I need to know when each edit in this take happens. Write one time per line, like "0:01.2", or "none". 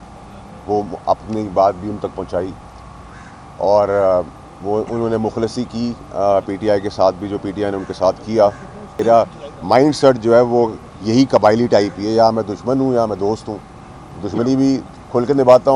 0:09.0